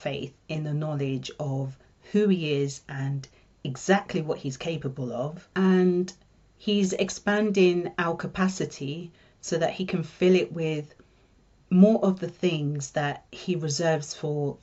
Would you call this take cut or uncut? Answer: uncut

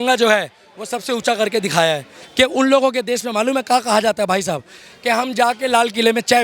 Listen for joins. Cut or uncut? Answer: cut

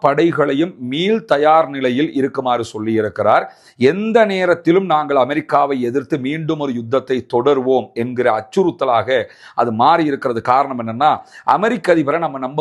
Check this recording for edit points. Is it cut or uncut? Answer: uncut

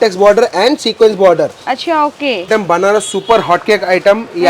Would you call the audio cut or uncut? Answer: cut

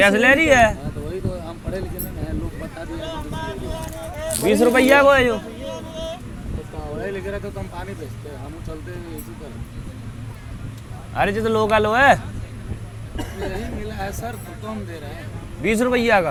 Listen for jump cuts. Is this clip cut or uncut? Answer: uncut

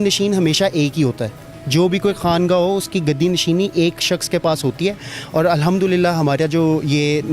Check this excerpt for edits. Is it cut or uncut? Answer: uncut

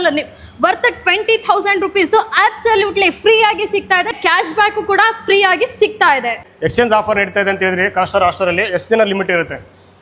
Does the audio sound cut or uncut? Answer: cut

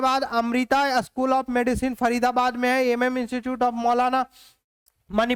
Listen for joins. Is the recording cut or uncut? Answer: uncut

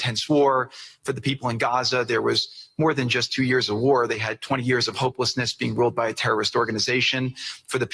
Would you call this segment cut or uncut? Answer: uncut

